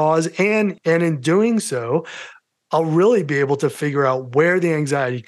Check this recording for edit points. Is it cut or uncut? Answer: uncut